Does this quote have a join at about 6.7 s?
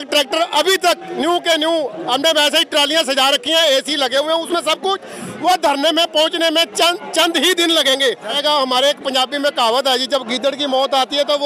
no; 1 cut; at 8.3 s

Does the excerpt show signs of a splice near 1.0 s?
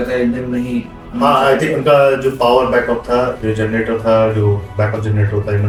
no; 0 cuts

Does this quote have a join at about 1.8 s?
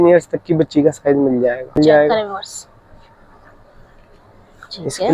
yes; 1 cut; at 1.8 s

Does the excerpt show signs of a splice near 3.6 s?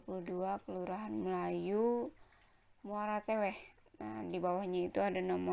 no; 1 cut; at 1.9 s

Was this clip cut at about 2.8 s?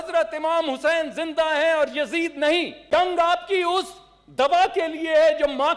yes; 1 cut; at 2.8 s

